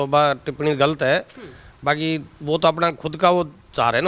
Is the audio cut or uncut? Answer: uncut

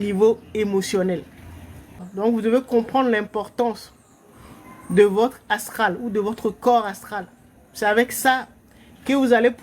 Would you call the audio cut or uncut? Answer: cut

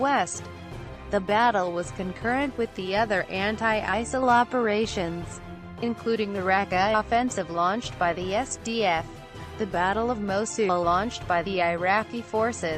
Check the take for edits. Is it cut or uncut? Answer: uncut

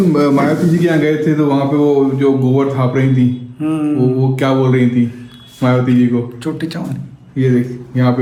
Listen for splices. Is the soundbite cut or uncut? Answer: uncut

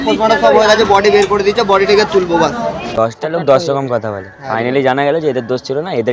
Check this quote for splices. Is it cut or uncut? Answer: cut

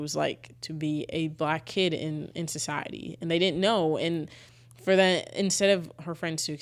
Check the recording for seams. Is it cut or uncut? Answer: uncut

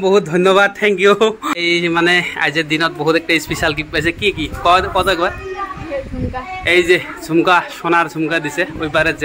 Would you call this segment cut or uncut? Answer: cut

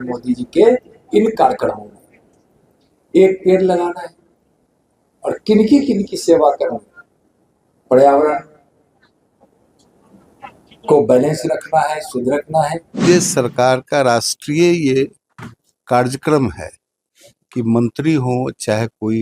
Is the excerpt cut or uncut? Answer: cut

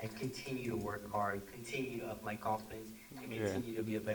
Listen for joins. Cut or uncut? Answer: uncut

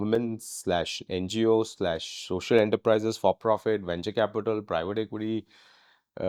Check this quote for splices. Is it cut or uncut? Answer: uncut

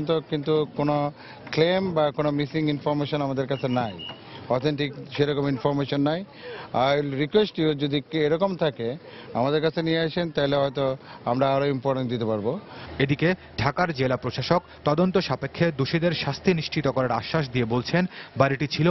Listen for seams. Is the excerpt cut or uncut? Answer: uncut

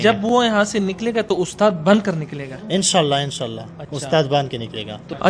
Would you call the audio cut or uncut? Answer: uncut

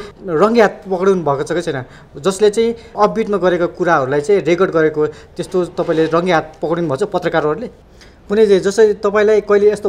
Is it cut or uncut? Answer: cut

